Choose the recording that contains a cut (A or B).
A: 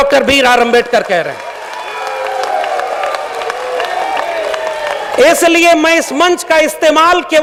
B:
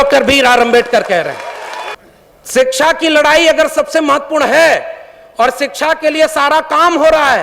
B